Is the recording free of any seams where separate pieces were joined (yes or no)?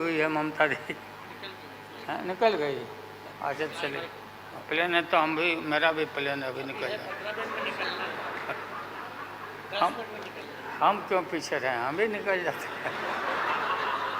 no